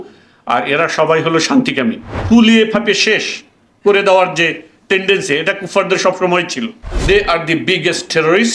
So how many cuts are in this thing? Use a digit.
2